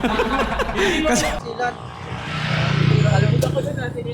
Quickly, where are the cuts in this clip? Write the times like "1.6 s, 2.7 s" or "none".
1.4 s